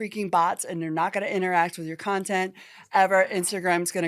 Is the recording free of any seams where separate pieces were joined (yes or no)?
yes